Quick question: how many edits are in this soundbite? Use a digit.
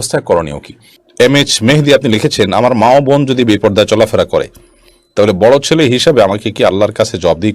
1